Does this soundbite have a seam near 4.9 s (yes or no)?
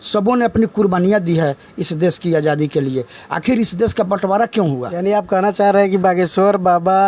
yes